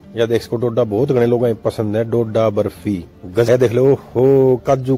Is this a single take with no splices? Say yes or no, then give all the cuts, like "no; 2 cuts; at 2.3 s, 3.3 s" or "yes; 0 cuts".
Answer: no; 1 cut; at 3.5 s